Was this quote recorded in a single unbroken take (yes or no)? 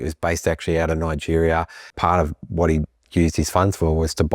no